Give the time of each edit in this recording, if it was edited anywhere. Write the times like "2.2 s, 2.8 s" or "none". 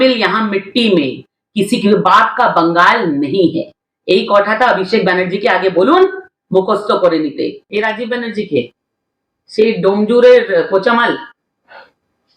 7.6 s